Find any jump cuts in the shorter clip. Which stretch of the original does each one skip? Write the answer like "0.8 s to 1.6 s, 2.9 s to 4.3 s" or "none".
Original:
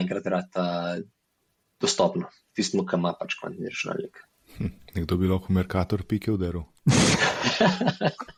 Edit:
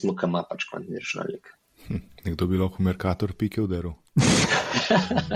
none